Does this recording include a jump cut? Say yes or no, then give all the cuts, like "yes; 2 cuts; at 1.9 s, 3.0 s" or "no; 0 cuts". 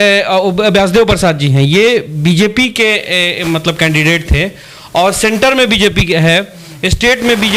no; 0 cuts